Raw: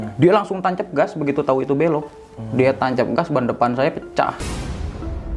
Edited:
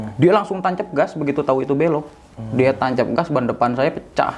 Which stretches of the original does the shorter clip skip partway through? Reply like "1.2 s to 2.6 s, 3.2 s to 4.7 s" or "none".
none

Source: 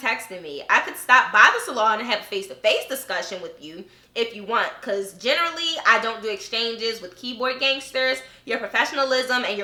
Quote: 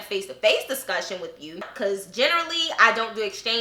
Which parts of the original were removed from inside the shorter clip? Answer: 3.9 s to 4.8 s

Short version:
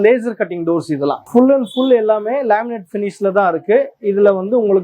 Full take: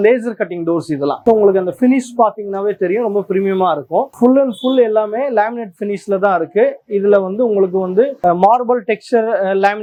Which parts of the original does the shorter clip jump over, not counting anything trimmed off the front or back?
1.2 s to 4.1 s

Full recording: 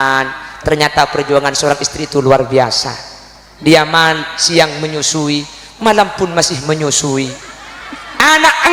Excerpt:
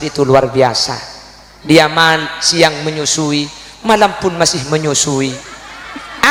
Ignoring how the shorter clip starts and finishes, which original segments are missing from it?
none

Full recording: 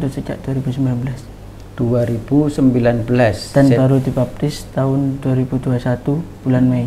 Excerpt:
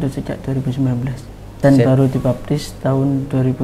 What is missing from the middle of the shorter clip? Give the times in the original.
1.5 s to 3.4 s

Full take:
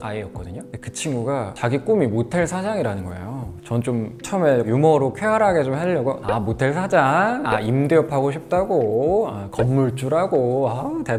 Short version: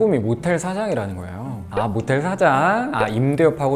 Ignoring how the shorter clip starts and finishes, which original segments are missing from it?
3.6 s to 6.2 s

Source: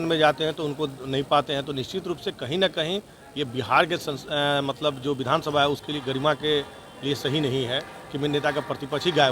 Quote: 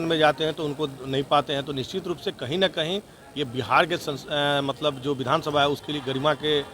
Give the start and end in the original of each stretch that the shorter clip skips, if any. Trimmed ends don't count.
none

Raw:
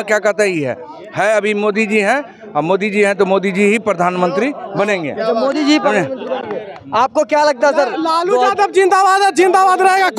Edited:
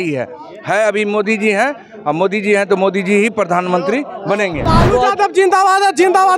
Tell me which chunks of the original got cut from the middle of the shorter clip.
5.1 s to 8.0 s

